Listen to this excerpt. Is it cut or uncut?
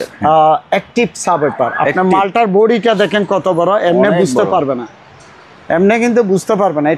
uncut